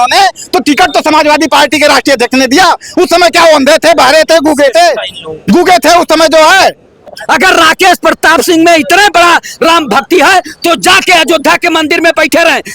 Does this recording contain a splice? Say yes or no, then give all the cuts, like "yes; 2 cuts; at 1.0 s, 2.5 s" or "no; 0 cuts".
yes; 1 cut; at 7.2 s